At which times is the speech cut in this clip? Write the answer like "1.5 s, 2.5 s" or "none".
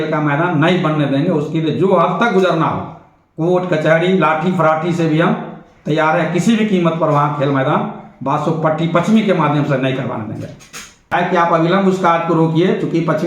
11.1 s